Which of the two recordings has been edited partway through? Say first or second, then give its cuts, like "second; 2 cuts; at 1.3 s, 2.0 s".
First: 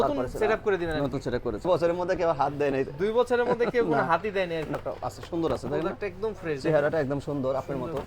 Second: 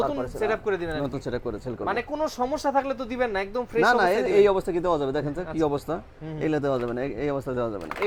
first; 2 cuts; at 1.7 s, 4.8 s